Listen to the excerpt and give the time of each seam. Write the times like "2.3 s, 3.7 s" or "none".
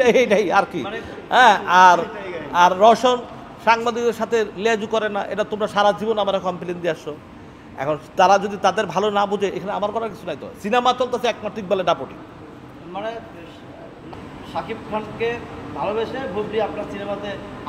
14.0 s